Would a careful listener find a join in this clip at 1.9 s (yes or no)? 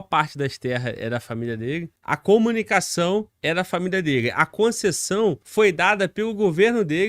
yes